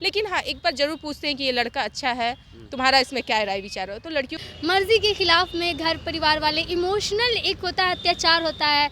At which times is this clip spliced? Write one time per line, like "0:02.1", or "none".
0:04.4